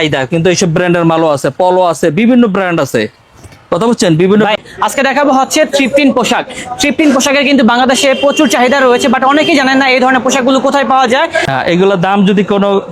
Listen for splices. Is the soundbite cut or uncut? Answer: cut